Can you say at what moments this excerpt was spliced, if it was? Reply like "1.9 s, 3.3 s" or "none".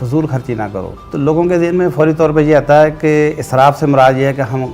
1.0 s